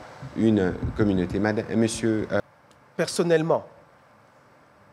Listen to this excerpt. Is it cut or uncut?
cut